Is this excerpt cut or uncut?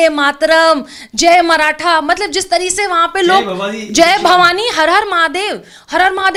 uncut